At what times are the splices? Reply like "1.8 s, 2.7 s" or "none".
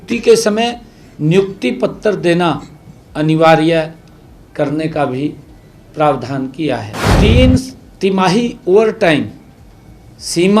7.0 s